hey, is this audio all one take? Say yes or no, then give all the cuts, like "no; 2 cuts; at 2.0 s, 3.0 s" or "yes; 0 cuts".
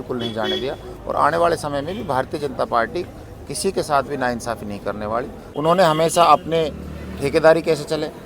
no; 1 cut; at 5.4 s